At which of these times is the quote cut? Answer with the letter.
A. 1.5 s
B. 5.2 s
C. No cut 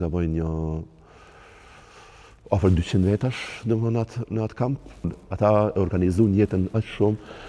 B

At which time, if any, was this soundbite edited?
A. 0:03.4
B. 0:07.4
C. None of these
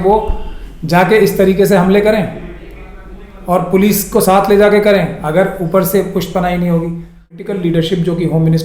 B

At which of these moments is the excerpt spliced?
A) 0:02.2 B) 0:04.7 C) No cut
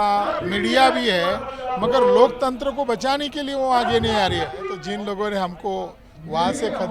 B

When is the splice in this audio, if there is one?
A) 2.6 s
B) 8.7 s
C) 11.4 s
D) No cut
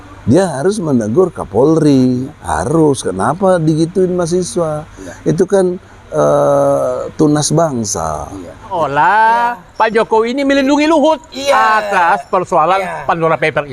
B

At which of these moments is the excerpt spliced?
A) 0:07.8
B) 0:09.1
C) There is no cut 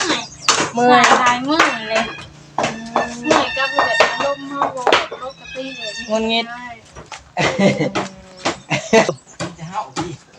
B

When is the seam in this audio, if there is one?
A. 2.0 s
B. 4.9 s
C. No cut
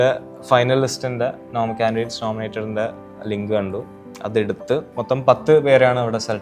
B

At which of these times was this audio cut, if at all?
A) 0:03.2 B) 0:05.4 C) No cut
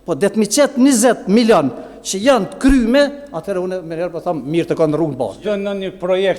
B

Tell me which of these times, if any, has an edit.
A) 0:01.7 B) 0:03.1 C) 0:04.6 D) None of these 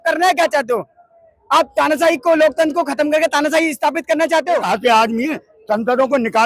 C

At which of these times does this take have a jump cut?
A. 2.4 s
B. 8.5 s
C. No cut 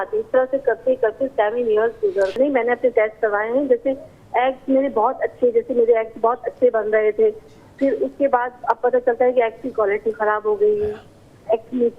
A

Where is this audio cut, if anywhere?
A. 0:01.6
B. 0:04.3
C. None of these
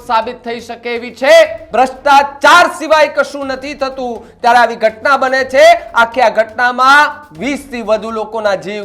A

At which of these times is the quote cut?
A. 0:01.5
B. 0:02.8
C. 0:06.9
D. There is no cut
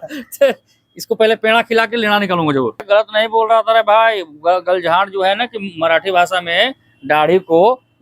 B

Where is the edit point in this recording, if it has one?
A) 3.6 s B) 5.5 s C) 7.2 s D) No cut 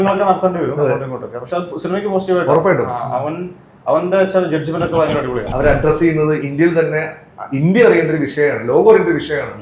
B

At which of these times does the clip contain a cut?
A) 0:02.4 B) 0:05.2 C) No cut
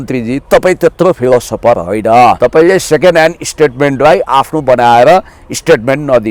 A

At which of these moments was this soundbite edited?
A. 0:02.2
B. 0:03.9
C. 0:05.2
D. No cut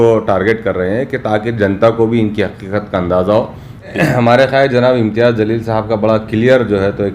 B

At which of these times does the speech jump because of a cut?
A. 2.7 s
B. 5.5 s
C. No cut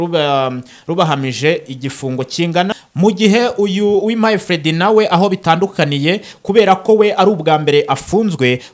A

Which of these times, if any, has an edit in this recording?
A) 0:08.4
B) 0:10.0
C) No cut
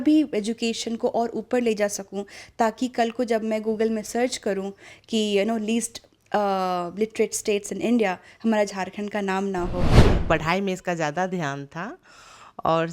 B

